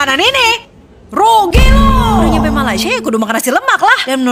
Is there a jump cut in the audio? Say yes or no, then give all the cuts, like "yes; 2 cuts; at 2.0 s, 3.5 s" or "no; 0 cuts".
no; 0 cuts